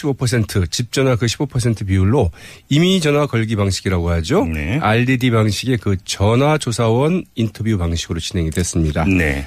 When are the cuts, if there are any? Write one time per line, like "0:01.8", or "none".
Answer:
none